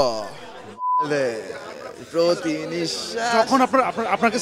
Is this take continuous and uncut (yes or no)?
yes